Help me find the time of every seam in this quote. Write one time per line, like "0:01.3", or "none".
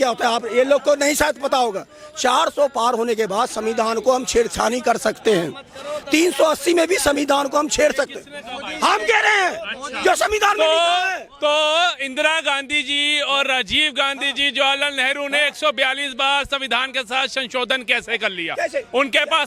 none